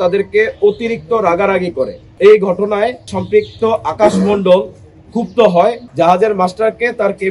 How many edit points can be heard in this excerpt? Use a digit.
3